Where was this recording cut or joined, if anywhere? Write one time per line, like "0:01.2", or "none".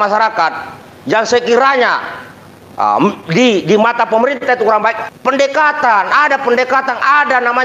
0:05.1